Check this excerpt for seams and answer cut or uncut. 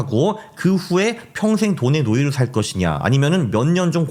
uncut